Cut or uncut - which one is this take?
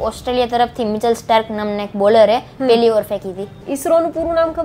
cut